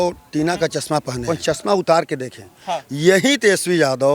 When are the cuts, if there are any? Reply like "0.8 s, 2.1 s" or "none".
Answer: 1.3 s